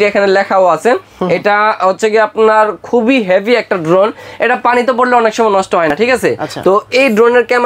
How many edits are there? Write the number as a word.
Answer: zero